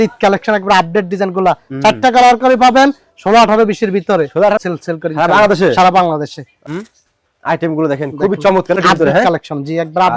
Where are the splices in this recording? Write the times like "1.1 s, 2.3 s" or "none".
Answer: 4.6 s, 6.6 s, 8.8 s